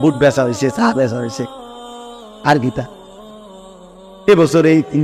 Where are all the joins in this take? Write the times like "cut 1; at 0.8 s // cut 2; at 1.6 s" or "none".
cut 1; at 2.9 s // cut 2; at 4.2 s